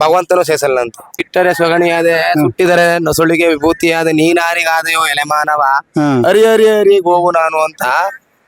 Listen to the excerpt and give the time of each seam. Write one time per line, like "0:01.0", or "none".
0:01.2